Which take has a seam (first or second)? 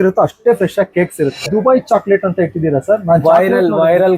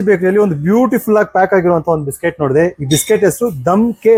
first